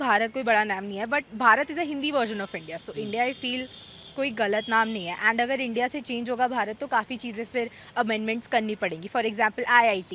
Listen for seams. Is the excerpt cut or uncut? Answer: uncut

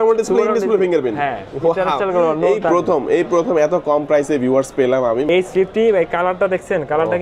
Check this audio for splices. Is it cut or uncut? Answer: cut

